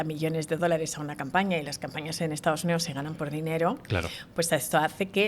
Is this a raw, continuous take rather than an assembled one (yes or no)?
yes